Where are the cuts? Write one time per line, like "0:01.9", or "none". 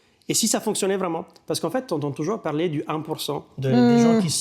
none